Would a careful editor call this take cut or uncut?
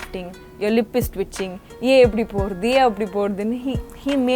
uncut